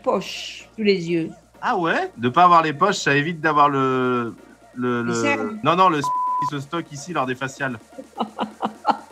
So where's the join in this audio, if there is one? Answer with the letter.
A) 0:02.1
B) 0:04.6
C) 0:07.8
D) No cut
A